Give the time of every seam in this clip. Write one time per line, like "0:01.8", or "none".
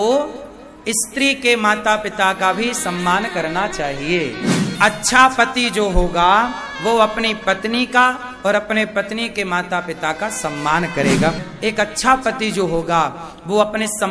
0:04.7
0:11.4